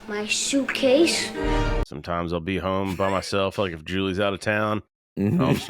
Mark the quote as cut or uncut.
cut